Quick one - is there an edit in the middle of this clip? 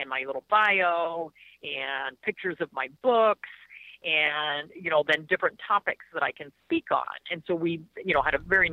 no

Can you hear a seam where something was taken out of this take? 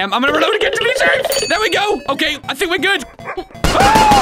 yes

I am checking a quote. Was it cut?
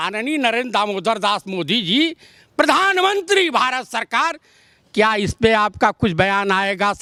no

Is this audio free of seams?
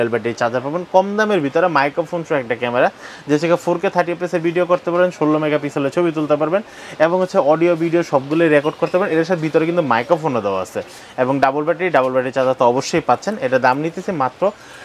yes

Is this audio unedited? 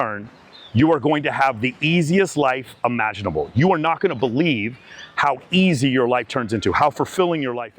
yes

